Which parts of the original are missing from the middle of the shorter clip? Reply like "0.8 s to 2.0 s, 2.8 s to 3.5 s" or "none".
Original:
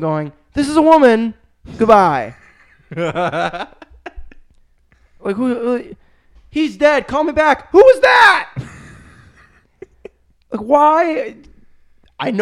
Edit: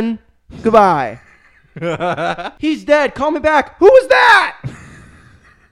3.6 s to 6.4 s